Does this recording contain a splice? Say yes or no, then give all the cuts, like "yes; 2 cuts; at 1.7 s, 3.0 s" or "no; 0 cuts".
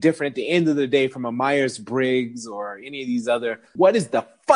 yes; 1 cut; at 3.6 s